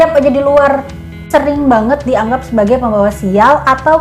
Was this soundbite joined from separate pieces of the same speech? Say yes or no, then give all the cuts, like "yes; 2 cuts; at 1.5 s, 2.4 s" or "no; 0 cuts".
yes; 1 cut; at 1.2 s